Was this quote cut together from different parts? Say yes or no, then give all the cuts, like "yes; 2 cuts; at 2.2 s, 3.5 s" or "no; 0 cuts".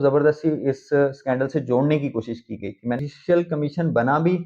yes; 1 cut; at 3.0 s